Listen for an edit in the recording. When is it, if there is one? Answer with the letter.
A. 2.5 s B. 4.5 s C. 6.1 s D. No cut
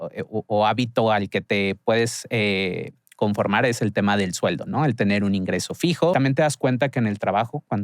C